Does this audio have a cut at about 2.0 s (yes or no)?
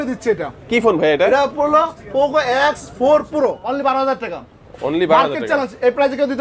no